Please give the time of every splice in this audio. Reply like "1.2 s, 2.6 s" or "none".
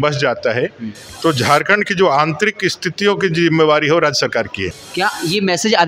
4.7 s